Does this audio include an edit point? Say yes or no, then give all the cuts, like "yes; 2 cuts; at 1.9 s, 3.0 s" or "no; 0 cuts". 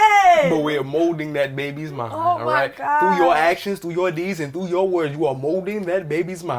no; 0 cuts